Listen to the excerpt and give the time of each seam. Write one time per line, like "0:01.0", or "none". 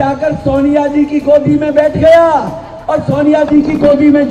none

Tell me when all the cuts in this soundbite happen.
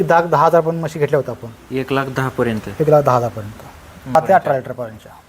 0:04.1

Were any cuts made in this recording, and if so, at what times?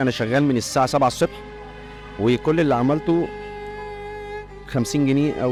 none

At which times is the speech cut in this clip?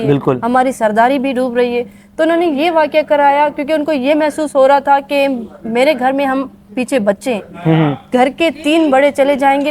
none

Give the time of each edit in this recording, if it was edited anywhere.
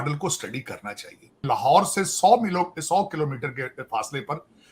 0:01.4

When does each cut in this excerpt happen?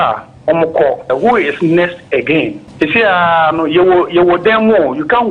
0:01.1

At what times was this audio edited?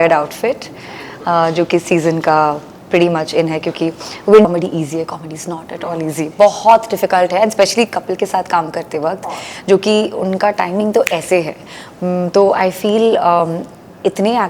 0:04.4

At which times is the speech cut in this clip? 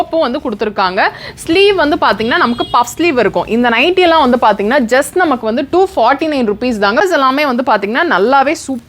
0:07.0

